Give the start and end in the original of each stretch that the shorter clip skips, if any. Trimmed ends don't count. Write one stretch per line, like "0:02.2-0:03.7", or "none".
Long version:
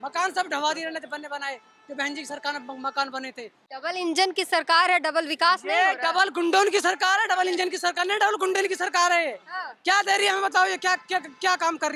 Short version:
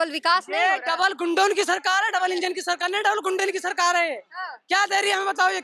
none